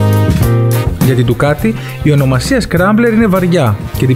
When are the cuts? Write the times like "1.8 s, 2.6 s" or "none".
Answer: 2.2 s